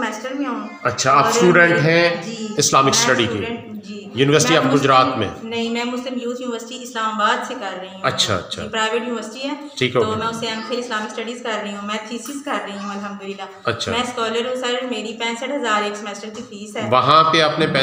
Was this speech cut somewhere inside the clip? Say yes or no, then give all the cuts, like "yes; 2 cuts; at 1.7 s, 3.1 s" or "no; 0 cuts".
no; 0 cuts